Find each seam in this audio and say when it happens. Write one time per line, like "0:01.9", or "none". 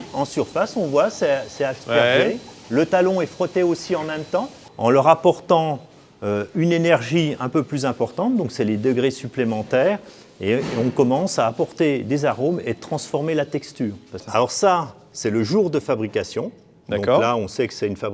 0:04.6
0:14.2